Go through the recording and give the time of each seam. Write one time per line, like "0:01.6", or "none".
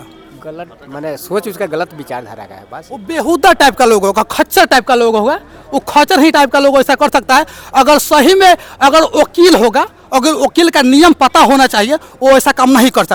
none